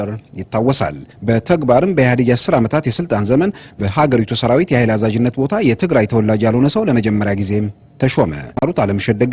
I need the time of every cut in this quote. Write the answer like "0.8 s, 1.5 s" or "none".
1.1 s, 8.6 s